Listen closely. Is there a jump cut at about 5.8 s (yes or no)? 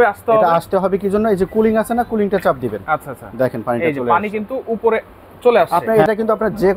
yes